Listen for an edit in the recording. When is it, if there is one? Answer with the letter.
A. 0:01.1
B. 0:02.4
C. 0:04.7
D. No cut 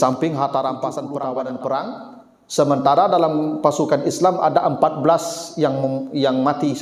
A